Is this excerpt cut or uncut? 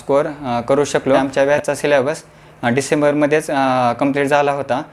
cut